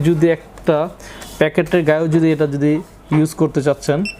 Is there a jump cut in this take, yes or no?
no